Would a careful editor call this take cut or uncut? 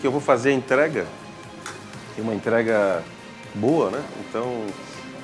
uncut